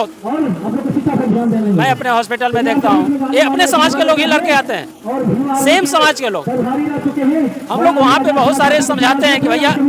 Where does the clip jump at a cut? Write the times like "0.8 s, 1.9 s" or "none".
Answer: none